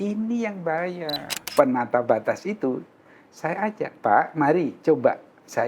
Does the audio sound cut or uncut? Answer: cut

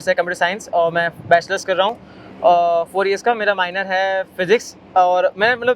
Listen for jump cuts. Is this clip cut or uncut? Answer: uncut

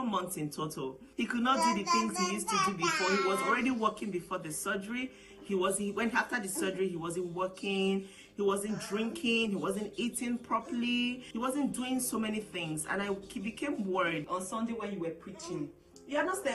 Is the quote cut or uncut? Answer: cut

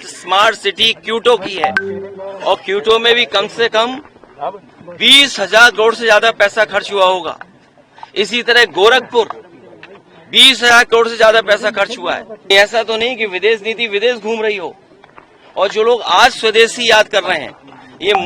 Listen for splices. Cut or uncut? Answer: cut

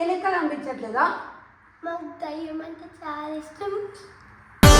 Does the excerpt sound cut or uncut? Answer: uncut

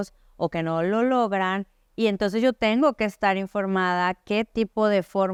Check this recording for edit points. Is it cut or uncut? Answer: uncut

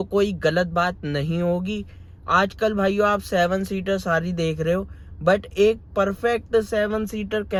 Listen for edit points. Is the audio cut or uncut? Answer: uncut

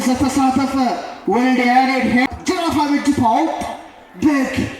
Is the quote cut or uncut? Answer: cut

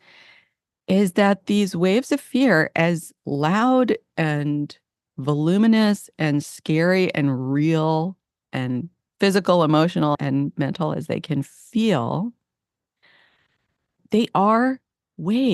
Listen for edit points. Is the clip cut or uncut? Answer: cut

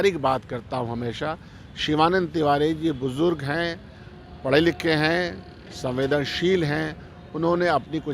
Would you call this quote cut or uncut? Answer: uncut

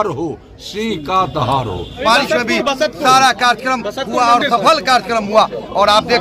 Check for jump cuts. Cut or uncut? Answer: cut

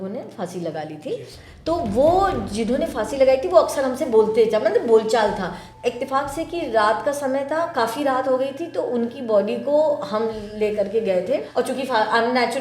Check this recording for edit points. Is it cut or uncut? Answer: cut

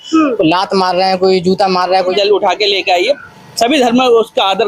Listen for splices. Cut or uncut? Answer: cut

